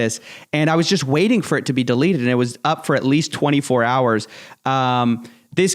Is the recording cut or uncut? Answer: uncut